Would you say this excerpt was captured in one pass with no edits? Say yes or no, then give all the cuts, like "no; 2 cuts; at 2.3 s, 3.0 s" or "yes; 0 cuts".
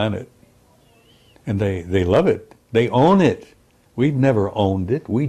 yes; 0 cuts